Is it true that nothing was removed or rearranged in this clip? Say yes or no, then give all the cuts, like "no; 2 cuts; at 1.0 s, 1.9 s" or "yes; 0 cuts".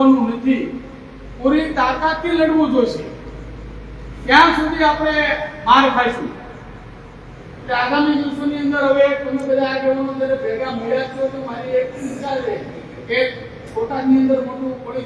yes; 0 cuts